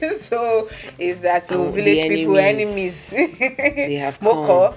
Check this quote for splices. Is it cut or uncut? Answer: uncut